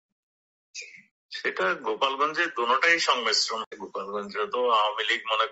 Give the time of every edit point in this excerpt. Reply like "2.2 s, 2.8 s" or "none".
3.7 s